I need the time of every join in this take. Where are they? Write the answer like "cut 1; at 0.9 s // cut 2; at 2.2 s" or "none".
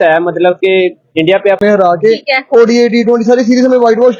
cut 1; at 1.6 s